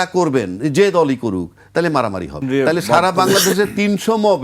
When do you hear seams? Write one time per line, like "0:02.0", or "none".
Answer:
0:02.4